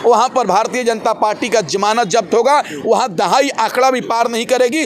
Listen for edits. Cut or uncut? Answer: uncut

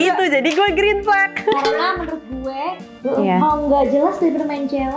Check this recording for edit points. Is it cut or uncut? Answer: cut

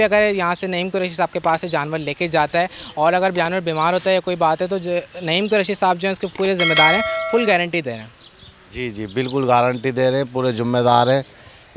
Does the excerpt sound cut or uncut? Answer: uncut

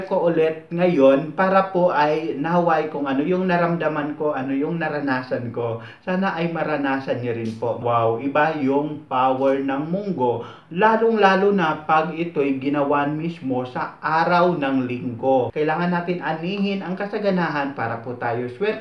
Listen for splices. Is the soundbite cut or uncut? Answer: cut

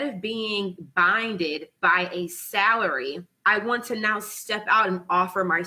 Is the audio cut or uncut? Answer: cut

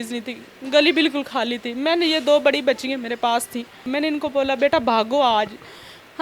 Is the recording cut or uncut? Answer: cut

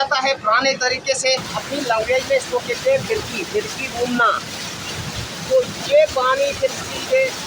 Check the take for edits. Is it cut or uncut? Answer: cut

